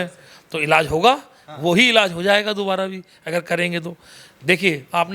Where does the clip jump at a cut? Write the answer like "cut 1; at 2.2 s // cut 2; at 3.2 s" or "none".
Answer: none